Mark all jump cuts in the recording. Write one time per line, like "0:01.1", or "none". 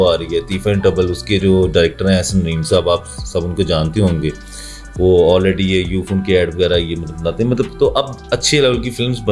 none

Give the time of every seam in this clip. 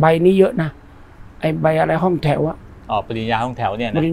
none

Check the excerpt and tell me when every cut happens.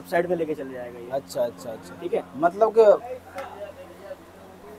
0:03.0

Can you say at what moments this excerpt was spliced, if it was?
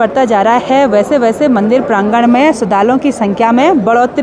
none

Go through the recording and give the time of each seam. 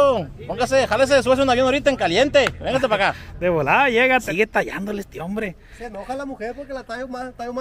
0:04.3

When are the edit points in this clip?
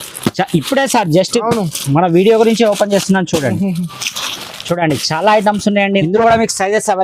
0:06.0

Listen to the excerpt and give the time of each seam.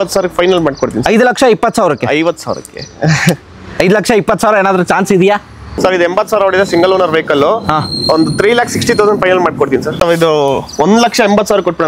0:05.7
0:10.0

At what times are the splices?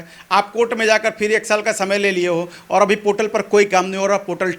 none

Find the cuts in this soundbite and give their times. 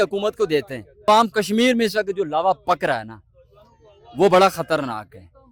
0:01.1

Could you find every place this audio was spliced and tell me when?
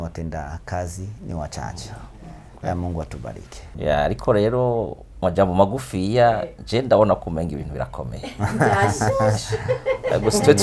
0:03.6

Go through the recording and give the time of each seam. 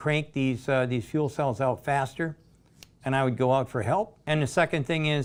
none

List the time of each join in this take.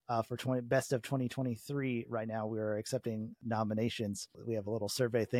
0:03.4
0:04.4

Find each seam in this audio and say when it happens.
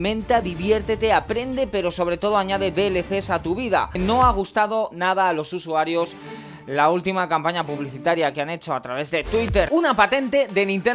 0:04.0
0:09.7

